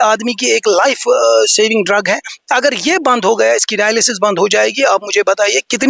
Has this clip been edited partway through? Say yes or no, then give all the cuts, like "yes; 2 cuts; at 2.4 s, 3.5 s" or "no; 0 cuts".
no; 0 cuts